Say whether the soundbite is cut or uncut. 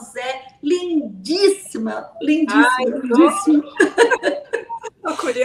uncut